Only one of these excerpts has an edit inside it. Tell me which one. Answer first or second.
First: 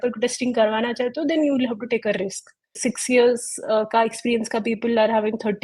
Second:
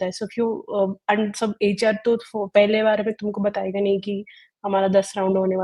first